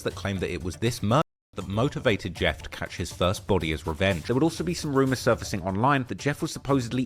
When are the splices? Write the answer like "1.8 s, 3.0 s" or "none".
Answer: 4.2 s